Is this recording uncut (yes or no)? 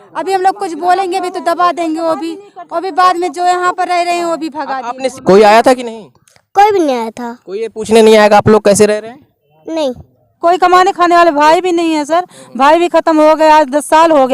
no